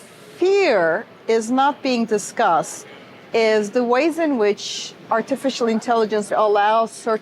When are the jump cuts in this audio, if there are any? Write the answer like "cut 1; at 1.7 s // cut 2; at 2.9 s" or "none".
cut 1; at 6.3 s